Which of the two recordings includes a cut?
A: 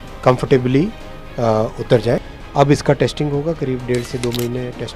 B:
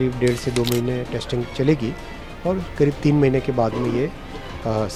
A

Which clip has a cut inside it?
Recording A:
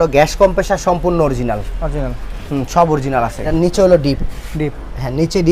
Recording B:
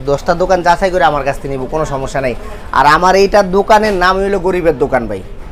A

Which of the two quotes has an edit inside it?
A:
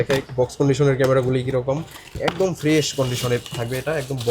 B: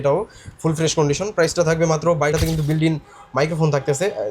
B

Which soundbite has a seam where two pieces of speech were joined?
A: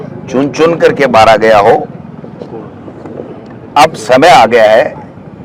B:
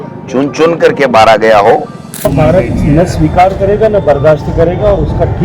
B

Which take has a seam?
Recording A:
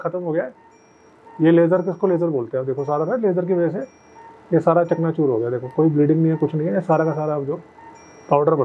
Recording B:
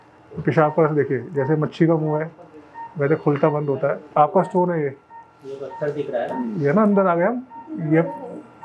B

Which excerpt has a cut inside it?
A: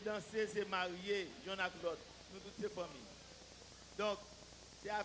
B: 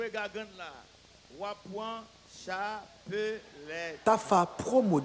B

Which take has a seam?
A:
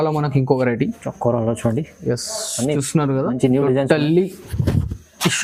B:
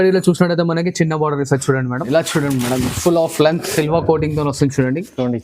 B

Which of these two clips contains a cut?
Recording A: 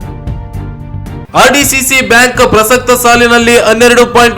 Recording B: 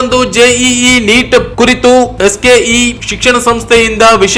A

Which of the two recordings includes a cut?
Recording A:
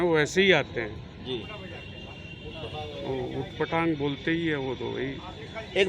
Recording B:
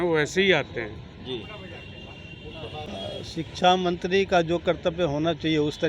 B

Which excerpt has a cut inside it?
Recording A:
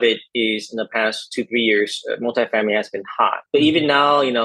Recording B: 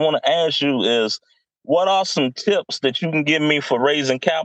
A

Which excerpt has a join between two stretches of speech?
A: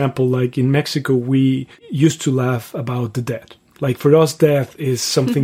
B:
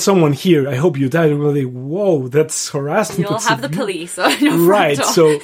A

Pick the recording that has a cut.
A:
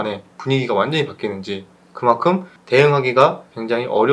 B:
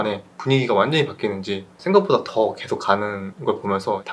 B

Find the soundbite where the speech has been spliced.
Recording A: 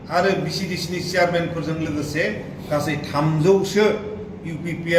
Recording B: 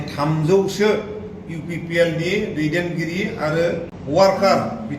B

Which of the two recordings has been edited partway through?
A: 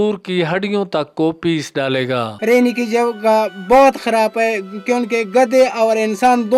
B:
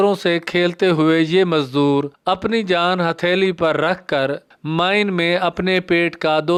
A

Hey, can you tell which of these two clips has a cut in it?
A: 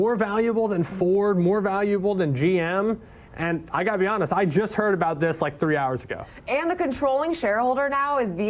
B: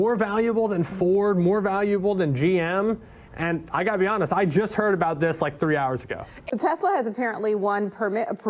B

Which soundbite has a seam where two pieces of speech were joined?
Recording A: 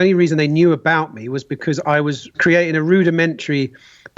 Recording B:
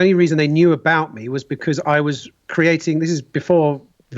A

